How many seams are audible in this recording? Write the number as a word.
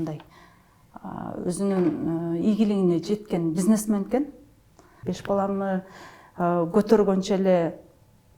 one